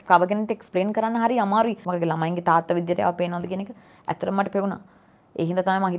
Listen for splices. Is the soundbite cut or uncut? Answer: cut